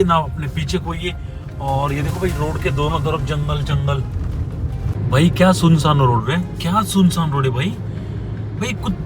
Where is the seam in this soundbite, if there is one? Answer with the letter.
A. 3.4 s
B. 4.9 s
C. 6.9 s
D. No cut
B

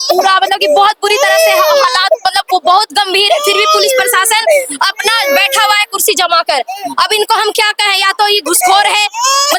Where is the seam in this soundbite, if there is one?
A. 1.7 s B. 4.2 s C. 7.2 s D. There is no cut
D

